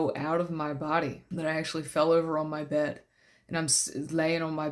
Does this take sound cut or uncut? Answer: cut